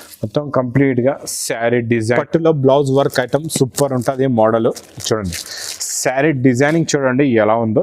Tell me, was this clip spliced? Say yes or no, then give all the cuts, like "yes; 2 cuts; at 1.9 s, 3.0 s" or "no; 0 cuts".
yes; 1 cut; at 2.2 s